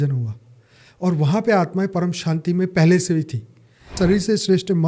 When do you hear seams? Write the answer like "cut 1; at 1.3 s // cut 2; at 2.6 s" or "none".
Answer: cut 1; at 3.9 s